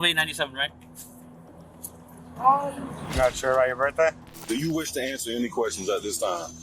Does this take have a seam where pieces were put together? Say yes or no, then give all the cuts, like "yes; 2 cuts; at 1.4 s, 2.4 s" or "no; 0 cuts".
yes; 1 cut; at 4.3 s